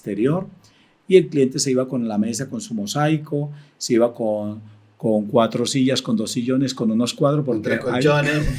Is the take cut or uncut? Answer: uncut